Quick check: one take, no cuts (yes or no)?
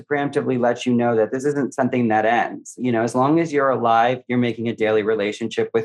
yes